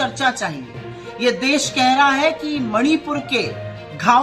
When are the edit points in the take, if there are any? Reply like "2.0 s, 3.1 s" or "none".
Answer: none

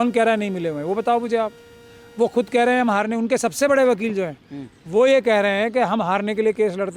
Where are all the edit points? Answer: none

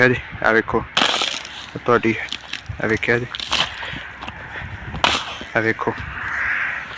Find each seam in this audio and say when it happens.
none

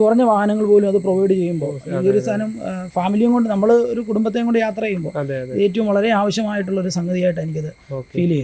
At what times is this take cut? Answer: none

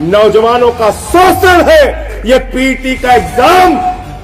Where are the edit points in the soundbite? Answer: 2.1 s

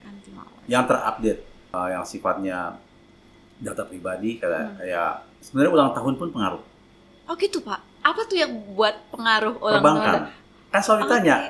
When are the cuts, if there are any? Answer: 1.6 s, 5.3 s

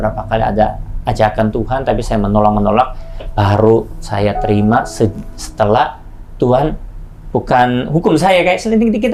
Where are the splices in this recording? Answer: none

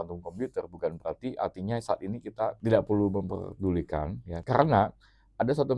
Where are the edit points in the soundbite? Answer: 2.6 s, 4.4 s

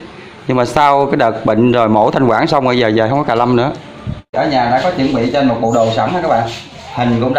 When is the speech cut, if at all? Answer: 4.3 s

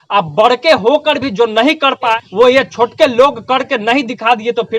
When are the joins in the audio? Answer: 2.1 s

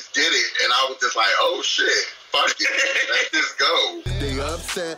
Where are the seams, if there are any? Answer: 4.1 s

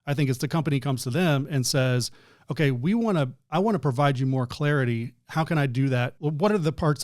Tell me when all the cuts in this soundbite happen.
6.1 s

